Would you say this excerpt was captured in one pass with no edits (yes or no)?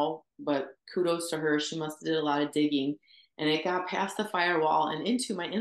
yes